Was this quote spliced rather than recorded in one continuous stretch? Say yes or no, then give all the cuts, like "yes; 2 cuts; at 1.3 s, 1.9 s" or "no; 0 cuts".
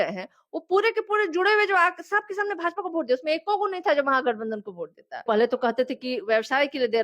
yes; 1 cut; at 5.2 s